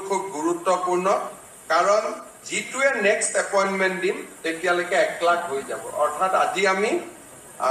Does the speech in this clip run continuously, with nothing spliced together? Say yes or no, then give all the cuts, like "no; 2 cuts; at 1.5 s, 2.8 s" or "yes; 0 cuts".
yes; 0 cuts